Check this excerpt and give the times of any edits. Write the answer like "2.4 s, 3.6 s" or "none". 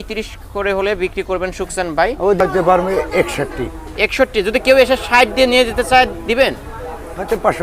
2.4 s

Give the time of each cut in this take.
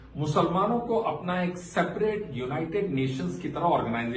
none

